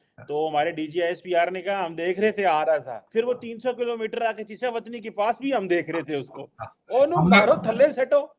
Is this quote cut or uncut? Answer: cut